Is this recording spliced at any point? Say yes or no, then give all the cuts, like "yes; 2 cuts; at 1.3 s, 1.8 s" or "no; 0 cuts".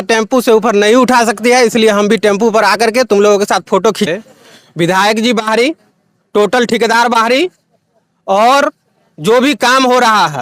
yes; 1 cut; at 4.1 s